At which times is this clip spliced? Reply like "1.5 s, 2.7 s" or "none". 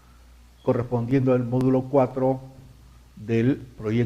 3.0 s